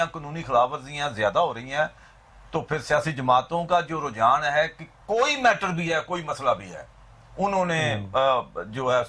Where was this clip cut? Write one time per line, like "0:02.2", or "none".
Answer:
none